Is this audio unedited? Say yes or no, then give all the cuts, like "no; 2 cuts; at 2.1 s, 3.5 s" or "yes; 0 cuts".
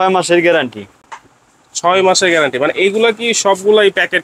yes; 0 cuts